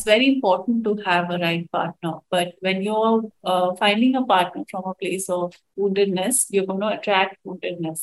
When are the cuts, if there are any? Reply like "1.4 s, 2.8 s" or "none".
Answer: none